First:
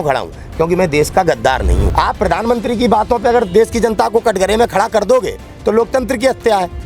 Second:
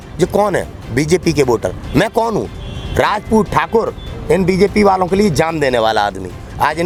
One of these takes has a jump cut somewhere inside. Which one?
first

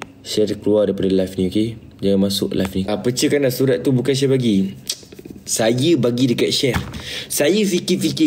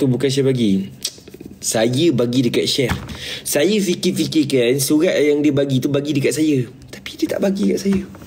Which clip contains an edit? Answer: first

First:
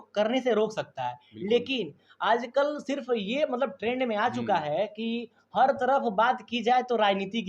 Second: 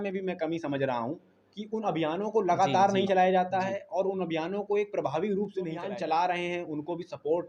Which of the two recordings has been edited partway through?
second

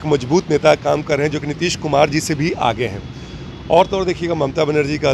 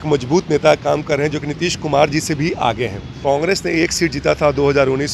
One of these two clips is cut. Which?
second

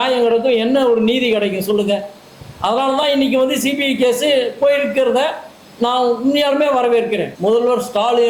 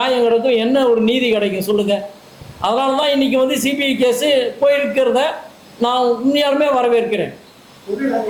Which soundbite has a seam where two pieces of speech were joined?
first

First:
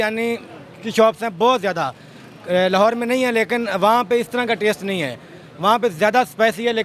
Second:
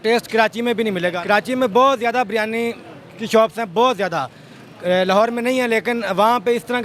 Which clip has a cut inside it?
second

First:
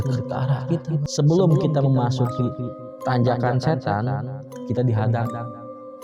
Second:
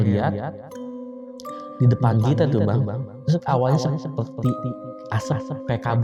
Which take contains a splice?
first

